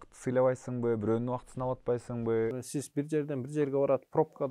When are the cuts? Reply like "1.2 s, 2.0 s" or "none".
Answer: 2.5 s